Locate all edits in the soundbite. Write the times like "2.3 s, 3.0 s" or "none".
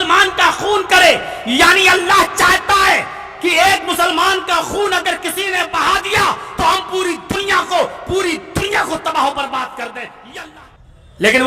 10.4 s